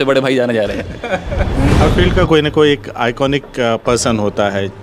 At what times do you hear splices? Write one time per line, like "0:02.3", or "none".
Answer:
0:01.7